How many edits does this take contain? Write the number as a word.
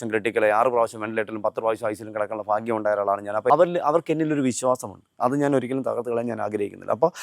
one